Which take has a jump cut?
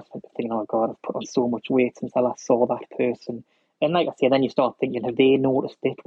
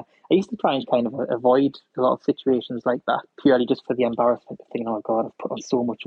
second; 1 cut; at 3.3 s

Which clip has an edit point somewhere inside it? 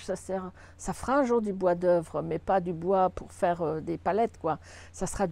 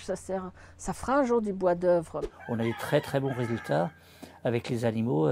second; 1 cut; at 2.2 s

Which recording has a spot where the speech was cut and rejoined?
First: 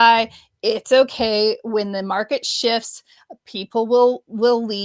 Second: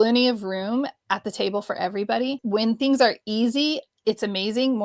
second; 1 cut; at 2.4 s

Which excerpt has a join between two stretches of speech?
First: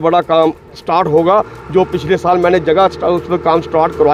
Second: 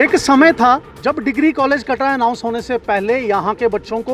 second; 1 cut; at 0.9 s

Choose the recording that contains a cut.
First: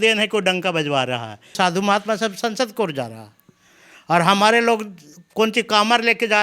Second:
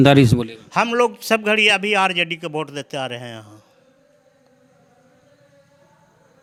first; 1 cut; at 1.5 s

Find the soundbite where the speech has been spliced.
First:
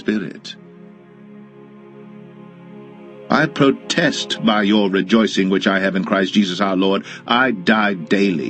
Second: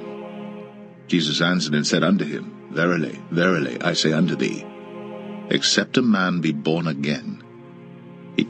first; 1 cut; at 3.1 s

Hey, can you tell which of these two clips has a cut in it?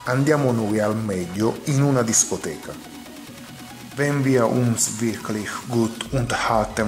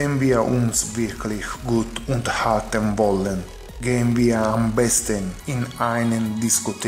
first; 2 cuts; at 2.7 s, 3.9 s

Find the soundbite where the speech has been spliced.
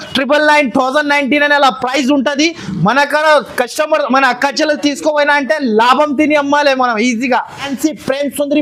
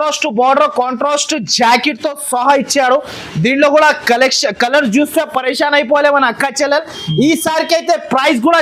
first; 1 cut; at 7.7 s

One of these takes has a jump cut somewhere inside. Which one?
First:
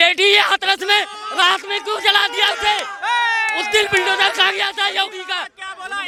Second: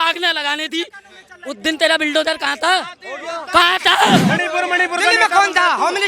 second; 1 cut; at 4.2 s

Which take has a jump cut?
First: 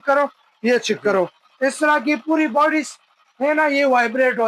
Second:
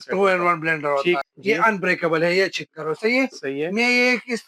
second; 1 cut; at 1.2 s

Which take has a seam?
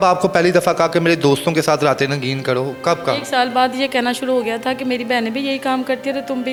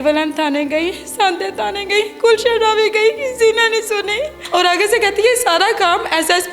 second; 1 cut; at 4.4 s

